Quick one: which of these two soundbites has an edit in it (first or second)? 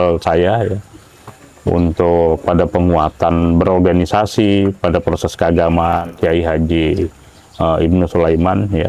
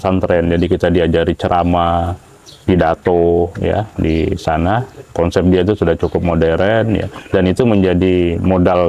first